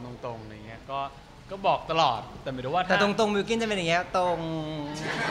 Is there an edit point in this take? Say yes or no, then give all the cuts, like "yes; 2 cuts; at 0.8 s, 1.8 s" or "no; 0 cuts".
no; 0 cuts